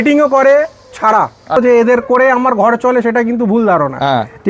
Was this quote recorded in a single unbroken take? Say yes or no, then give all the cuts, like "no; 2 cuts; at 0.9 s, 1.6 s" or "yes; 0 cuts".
no; 1 cut; at 1.6 s